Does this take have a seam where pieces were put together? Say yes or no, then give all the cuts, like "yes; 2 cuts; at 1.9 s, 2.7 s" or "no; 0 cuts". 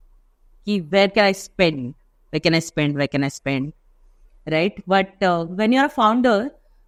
no; 0 cuts